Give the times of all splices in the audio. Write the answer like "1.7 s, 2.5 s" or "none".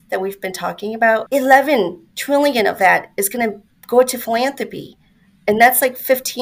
1.2 s